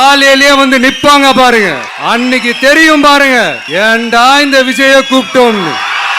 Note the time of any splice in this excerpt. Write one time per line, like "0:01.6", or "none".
0:01.9
0:03.6